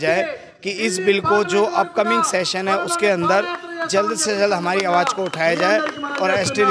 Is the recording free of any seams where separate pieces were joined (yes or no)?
yes